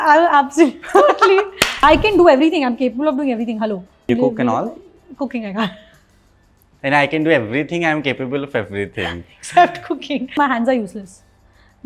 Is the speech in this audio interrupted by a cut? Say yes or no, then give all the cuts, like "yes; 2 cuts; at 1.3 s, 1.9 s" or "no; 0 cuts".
yes; 3 cuts; at 1.7 s, 4.1 s, 10.3 s